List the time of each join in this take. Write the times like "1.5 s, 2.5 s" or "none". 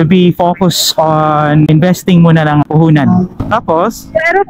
1.7 s, 2.6 s, 3.4 s